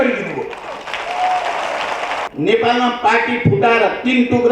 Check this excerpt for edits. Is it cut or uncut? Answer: cut